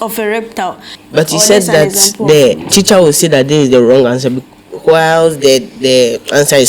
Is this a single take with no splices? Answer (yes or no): no